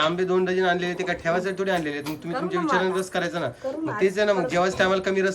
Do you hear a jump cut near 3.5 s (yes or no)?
no